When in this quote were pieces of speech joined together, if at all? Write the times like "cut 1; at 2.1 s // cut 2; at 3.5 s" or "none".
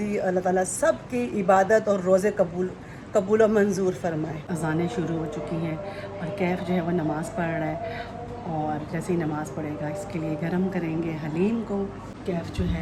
none